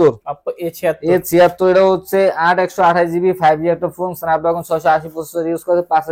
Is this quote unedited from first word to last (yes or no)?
yes